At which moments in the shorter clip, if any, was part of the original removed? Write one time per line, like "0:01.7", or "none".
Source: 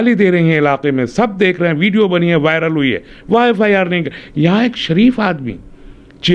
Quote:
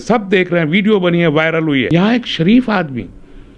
0:01.9